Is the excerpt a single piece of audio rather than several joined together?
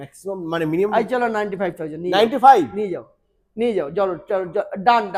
yes; 0 cuts

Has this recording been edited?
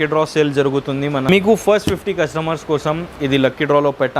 yes; 1 cut; at 1.2 s

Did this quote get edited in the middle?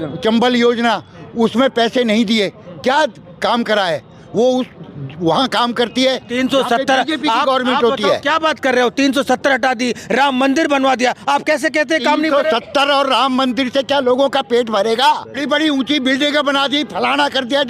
yes; 1 cut; at 15.4 s

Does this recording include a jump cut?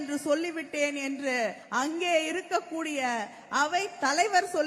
yes; 1 cut; at 1.6 s

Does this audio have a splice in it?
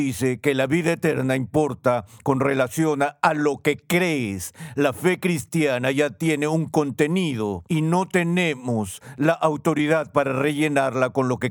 yes; 1 cut; at 7.6 s

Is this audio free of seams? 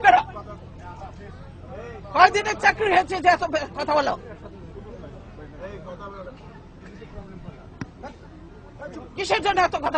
yes; 0 cuts

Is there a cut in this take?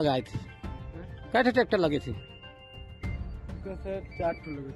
yes; 2 cuts; at 2.2 s, 3.6 s

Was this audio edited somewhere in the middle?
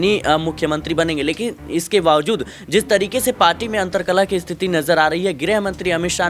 no; 0 cuts

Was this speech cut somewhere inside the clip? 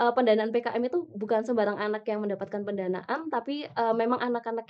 no; 0 cuts

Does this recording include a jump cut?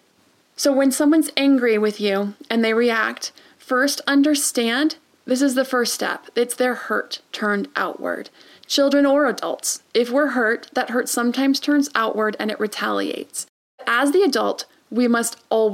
yes; 1 cut; at 13.9 s

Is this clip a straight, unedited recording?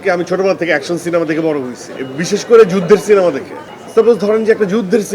yes; 0 cuts

